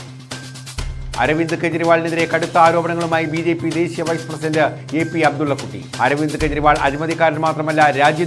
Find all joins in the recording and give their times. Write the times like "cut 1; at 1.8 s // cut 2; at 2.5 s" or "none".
none